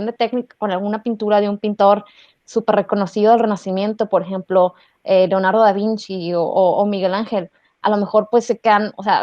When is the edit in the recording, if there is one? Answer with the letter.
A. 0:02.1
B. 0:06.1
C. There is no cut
C